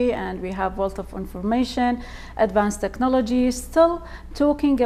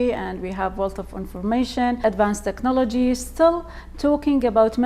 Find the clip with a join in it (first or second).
second